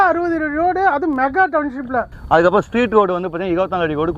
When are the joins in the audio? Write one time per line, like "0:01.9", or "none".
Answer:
0:02.1